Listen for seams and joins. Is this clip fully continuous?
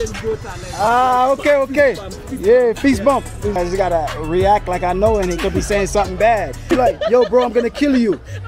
no; 2 cuts; at 3.6 s, 6.6 s

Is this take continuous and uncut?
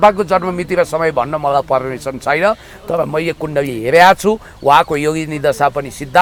yes; 0 cuts

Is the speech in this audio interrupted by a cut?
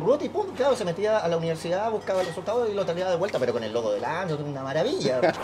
no; 0 cuts

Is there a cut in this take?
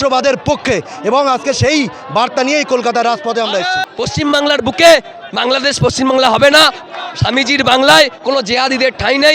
yes; 1 cut; at 3.9 s

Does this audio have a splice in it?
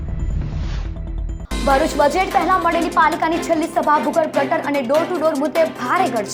no; 0 cuts

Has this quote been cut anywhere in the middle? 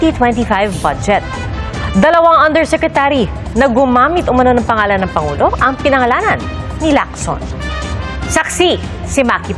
no; 0 cuts

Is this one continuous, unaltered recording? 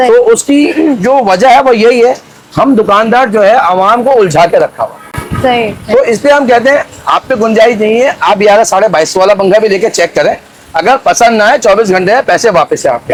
yes; 0 cuts

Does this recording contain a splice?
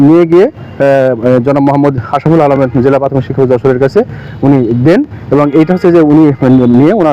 no; 0 cuts

